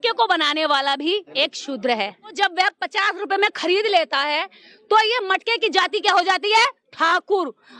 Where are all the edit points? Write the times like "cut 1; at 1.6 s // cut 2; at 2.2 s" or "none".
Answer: cut 1; at 1.3 s // cut 2; at 2.3 s